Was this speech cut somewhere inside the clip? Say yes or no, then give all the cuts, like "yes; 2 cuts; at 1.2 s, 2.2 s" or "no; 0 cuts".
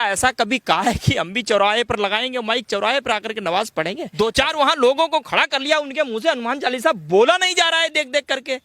yes; 1 cut; at 4.0 s